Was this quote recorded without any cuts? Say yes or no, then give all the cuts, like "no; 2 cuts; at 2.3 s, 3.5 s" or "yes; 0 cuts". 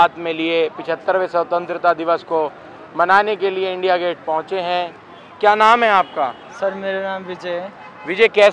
yes; 0 cuts